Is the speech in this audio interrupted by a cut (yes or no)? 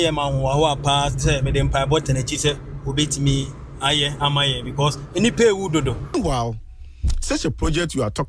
yes